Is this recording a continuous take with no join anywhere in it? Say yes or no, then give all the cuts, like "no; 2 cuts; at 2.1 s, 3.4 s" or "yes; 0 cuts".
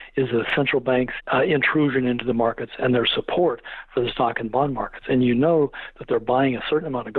no; 1 cut; at 1.2 s